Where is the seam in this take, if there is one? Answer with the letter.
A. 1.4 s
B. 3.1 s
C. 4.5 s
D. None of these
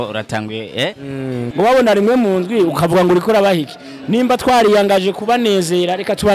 A